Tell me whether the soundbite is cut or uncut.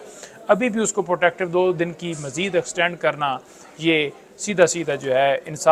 uncut